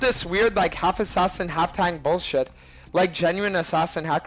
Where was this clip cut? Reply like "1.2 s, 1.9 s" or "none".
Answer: none